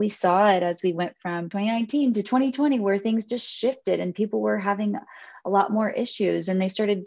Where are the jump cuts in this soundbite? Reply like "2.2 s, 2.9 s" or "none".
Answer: 1.5 s

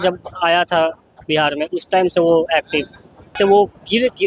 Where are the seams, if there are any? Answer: 3.4 s

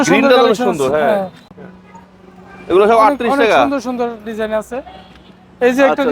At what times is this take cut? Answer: 1.6 s

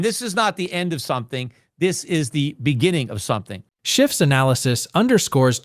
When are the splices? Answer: none

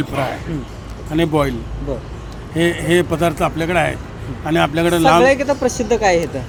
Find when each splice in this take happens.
none

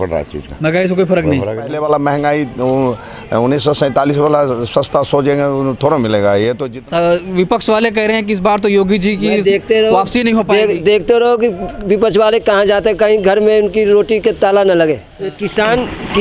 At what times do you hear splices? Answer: 1.7 s, 6.7 s, 15.2 s

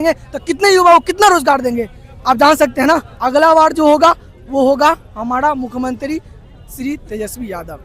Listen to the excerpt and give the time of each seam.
3.1 s

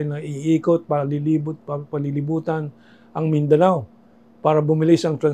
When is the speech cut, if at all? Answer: none

